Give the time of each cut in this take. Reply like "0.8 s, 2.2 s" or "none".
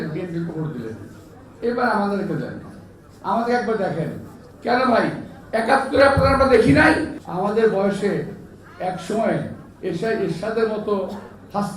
7.2 s